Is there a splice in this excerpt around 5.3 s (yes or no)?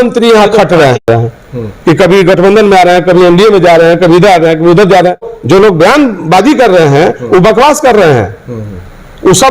yes